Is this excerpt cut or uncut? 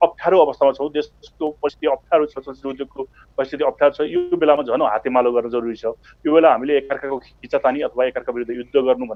uncut